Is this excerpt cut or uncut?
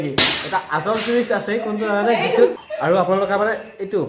cut